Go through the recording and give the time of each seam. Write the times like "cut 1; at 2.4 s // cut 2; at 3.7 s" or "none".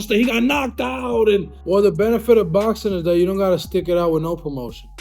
cut 1; at 1.5 s